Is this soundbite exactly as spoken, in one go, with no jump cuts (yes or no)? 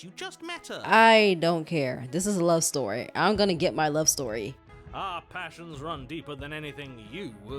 no